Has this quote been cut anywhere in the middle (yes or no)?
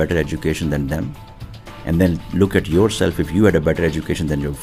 no